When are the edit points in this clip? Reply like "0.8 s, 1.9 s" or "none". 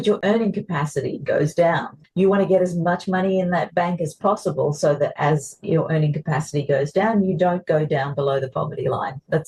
none